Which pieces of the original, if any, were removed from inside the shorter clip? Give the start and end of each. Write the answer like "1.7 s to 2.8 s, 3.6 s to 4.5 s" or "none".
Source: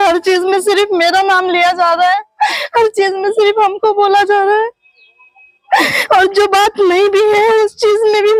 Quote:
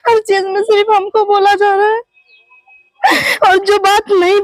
none